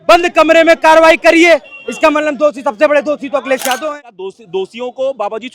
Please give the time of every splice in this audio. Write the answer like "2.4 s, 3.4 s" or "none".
3.8 s